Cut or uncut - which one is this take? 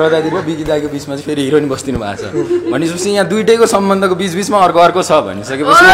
uncut